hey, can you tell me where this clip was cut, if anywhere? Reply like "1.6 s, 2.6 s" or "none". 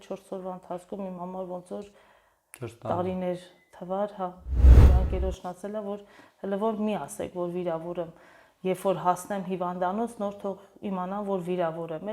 4.8 s